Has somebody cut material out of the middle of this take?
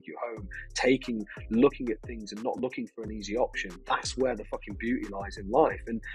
no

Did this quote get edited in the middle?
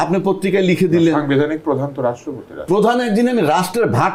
no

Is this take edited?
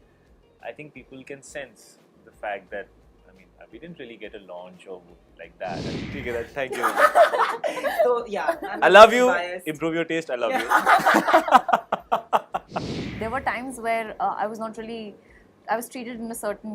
yes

